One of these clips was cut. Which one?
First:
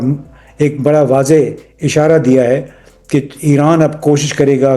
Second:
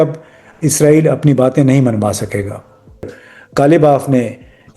second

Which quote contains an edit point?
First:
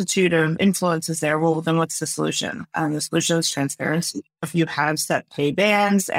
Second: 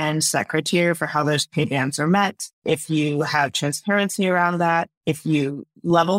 second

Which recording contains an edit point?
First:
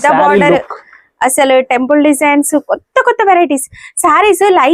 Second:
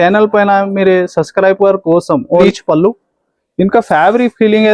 second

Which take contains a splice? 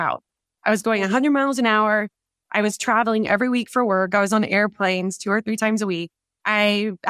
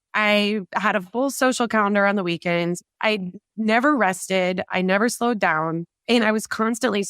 second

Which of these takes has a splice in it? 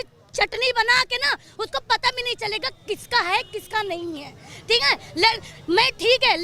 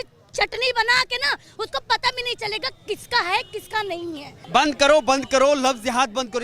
second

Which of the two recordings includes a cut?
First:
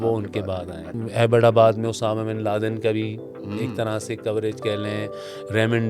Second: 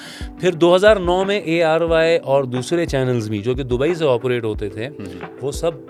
first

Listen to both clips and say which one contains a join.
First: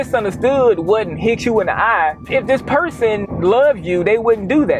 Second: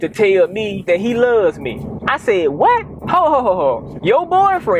first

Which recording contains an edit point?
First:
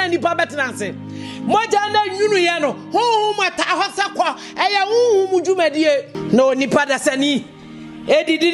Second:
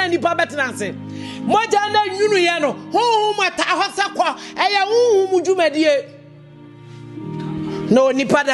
first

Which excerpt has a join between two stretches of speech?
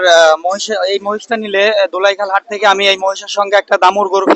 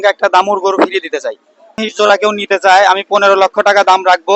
second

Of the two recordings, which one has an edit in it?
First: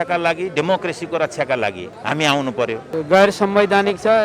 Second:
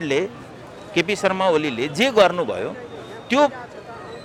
first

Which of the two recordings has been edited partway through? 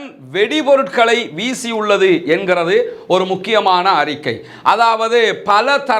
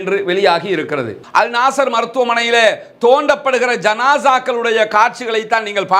second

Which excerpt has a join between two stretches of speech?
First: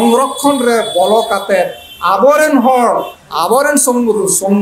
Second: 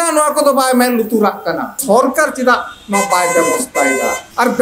second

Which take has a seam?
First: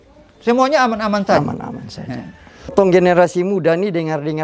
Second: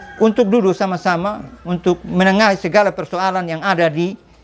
first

